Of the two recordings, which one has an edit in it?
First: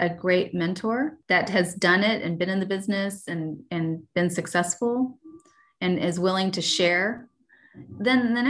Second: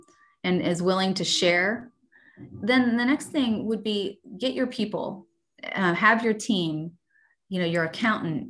first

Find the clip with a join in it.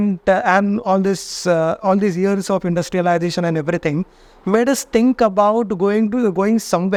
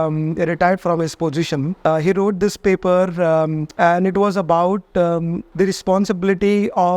second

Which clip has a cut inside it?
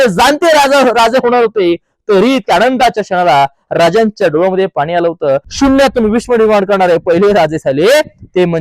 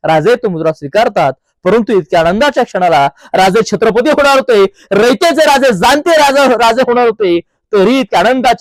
first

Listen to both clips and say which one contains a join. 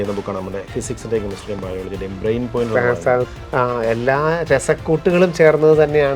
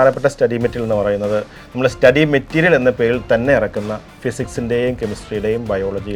first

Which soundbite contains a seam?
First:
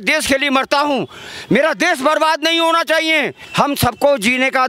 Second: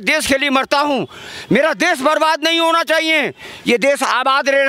first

